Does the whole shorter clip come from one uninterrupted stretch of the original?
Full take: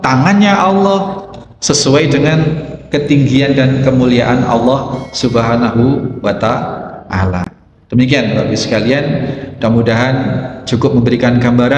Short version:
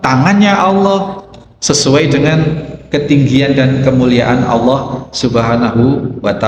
yes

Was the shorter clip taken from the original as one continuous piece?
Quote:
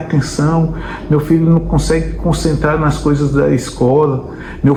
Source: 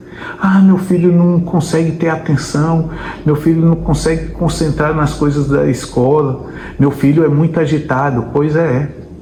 yes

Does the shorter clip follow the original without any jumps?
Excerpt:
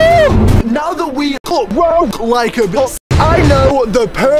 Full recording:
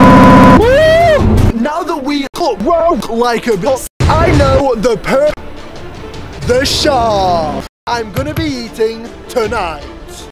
yes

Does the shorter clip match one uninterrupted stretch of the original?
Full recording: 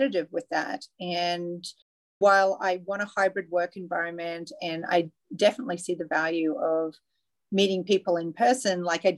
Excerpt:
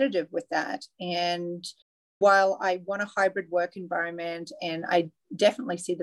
yes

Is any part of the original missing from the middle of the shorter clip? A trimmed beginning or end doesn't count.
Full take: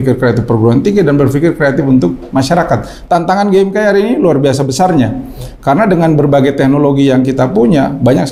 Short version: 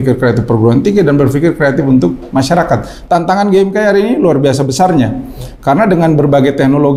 no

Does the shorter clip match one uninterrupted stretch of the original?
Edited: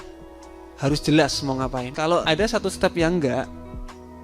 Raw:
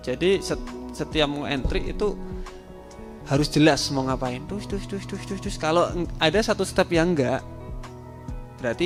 no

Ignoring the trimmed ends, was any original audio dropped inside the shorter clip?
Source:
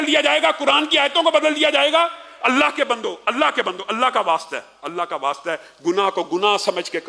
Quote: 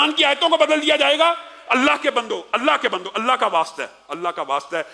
no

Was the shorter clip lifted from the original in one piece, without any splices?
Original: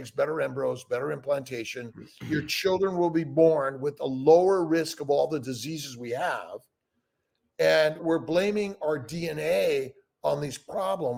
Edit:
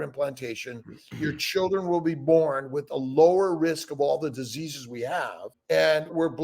no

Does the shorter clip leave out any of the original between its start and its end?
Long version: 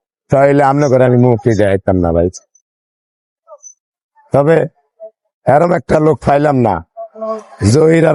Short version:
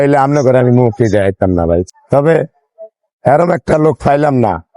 yes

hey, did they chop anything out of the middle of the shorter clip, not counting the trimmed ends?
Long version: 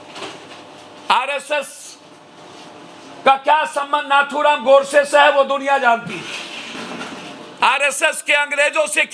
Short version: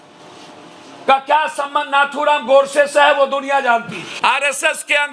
yes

